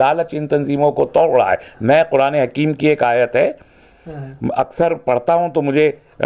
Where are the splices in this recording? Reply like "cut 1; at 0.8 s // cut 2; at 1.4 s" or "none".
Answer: none